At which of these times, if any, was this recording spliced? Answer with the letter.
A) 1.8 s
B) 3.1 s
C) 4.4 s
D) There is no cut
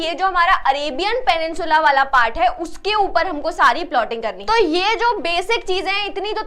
C